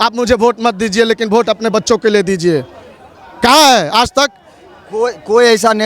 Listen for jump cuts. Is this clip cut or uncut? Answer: uncut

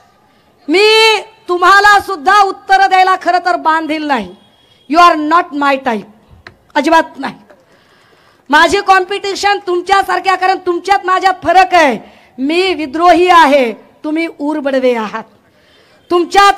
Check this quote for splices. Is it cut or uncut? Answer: uncut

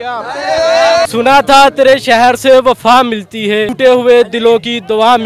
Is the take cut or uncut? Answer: cut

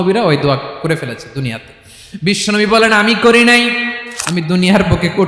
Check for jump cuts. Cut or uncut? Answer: cut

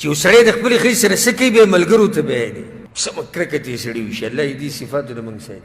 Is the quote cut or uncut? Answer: cut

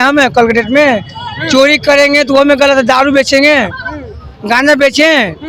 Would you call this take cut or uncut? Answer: uncut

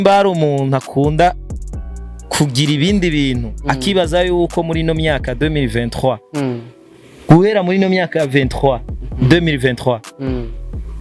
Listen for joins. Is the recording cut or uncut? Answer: uncut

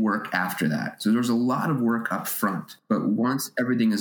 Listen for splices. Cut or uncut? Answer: cut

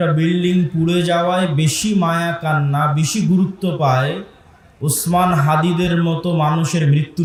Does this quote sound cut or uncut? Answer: uncut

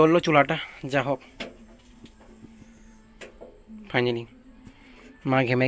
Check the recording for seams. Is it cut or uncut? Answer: uncut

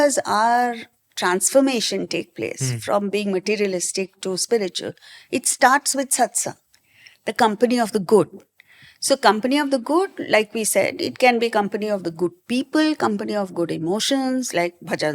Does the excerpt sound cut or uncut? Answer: uncut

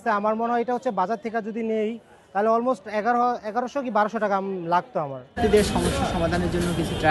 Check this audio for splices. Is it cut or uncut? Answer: uncut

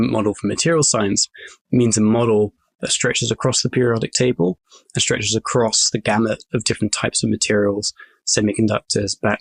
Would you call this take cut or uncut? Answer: uncut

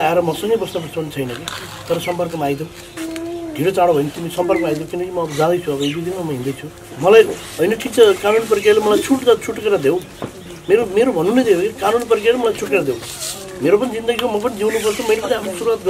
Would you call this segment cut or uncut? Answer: cut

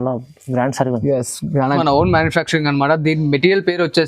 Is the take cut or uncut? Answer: cut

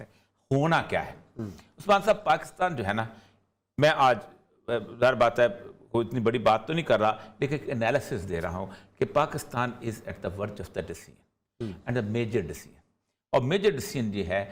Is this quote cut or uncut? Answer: uncut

